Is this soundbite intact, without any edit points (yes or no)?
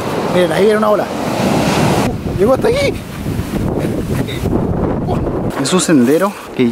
no